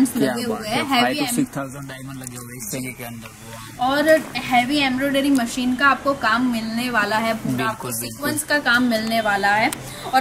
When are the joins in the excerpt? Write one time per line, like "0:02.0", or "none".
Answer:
none